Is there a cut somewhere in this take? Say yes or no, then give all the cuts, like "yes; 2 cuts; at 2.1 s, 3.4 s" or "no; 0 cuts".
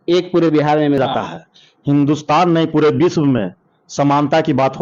yes; 1 cut; at 1.0 s